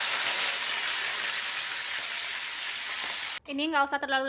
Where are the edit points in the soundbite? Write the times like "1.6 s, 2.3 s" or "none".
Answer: 3.4 s